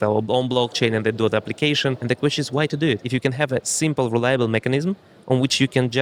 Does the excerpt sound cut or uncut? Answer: cut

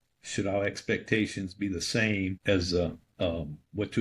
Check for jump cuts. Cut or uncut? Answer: cut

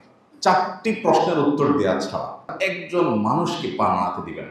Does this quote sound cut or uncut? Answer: cut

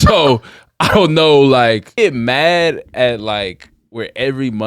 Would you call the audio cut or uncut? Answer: cut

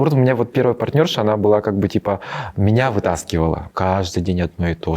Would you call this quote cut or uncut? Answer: cut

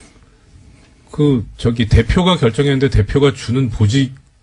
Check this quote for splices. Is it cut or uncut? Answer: cut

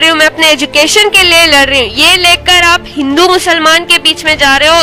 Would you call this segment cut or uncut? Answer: uncut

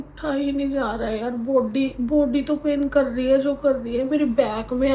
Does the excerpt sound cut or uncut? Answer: uncut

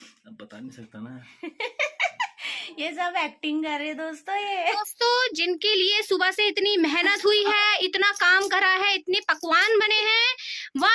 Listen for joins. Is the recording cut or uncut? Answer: cut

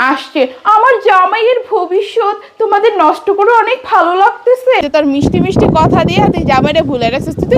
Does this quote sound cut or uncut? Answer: cut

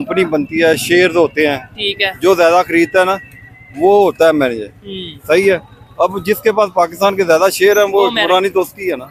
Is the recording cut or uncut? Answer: uncut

